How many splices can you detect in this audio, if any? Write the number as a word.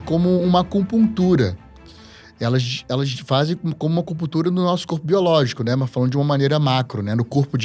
zero